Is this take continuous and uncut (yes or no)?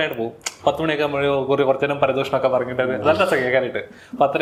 yes